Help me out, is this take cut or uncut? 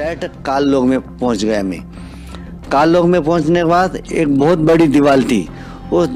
uncut